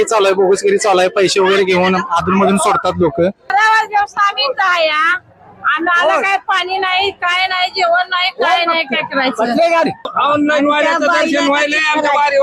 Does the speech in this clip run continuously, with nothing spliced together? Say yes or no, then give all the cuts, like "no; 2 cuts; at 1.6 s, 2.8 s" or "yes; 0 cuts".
no; 2 cuts; at 3.5 s, 10.1 s